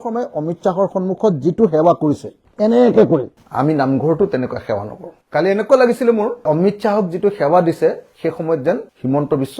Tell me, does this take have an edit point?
yes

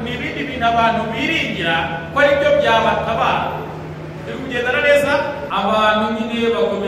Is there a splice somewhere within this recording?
yes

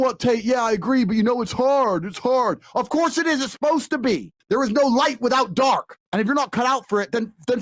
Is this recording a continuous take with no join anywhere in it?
no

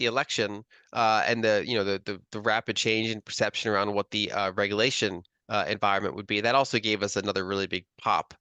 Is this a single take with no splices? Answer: yes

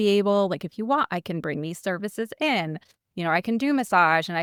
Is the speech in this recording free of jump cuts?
yes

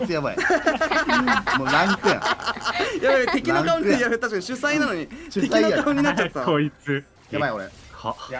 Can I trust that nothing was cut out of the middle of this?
yes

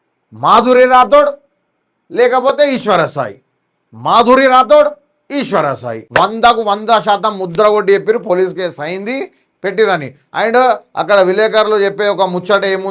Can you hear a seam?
yes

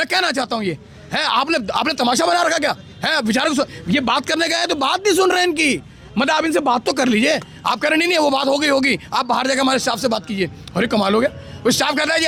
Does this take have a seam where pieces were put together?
no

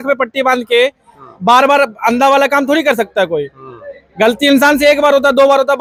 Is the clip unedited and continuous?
yes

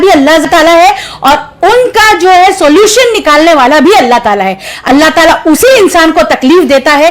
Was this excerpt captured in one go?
yes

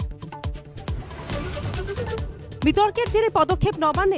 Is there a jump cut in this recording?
no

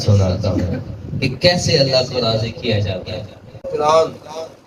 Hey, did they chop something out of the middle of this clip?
yes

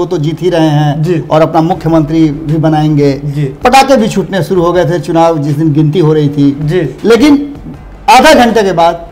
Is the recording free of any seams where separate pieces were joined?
yes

